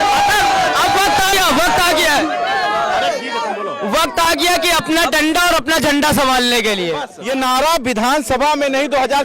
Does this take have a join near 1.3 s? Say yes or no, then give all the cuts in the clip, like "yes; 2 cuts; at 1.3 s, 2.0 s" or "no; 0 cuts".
yes; 2 cuts; at 1.3 s, 7.1 s